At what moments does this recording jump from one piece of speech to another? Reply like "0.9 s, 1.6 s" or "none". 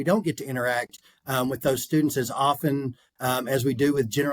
none